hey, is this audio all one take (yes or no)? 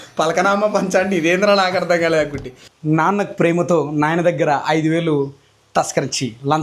no